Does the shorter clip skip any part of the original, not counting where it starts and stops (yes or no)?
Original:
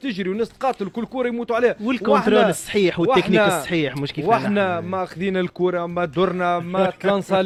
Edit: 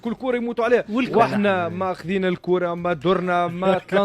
yes